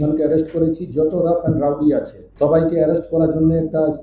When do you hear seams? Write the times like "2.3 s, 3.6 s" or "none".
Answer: 2.2 s